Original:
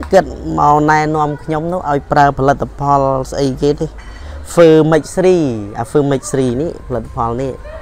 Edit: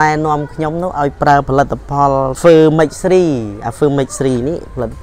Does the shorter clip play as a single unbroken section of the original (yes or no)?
no